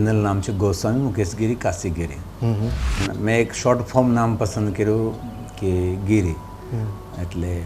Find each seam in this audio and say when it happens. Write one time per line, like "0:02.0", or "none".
0:03.0